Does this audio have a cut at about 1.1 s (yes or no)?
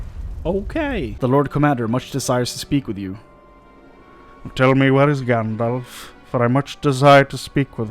yes